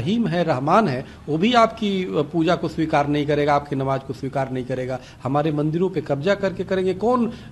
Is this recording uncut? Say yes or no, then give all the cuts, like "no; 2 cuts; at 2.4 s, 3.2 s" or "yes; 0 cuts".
yes; 0 cuts